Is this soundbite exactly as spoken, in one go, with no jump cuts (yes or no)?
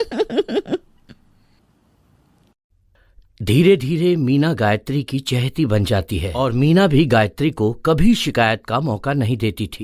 no